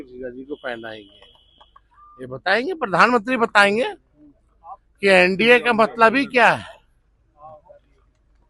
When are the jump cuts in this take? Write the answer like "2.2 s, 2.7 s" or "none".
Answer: none